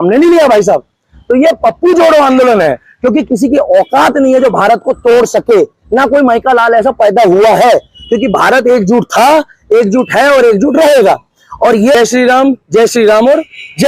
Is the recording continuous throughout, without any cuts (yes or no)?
no